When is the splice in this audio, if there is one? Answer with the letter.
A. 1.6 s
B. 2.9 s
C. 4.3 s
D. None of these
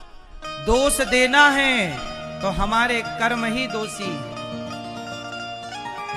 D